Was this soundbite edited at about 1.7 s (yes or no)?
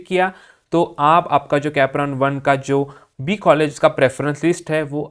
no